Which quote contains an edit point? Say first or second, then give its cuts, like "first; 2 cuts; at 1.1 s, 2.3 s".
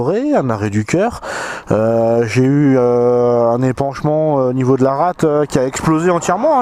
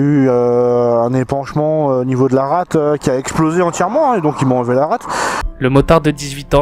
second; 1 cut; at 5.4 s